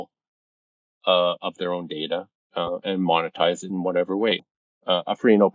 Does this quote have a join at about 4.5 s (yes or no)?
yes